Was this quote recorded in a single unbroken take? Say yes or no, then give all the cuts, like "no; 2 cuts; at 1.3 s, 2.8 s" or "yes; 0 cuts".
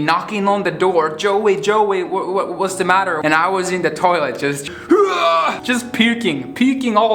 no; 2 cuts; at 3.2 s, 5.6 s